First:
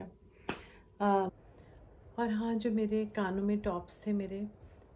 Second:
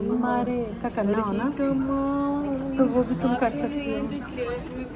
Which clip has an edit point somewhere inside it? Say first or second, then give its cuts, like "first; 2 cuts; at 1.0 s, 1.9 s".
first; 1 cut; at 1.3 s